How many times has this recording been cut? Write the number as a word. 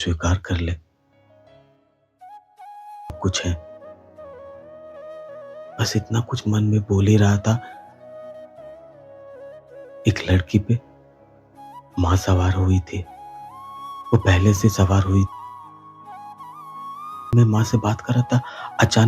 one